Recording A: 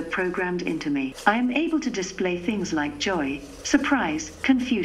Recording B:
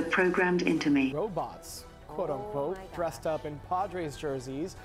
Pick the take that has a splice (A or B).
B